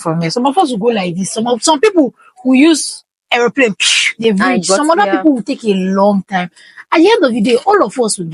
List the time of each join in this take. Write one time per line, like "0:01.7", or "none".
none